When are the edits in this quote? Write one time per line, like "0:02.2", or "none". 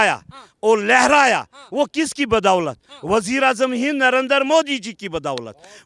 none